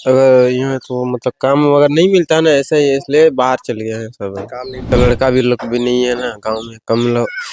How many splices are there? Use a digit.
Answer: 1